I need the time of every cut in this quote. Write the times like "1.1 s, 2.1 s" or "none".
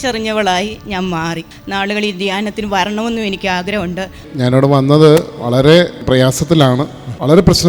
1.5 s, 4.2 s